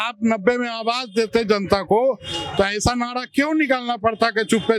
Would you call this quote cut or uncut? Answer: uncut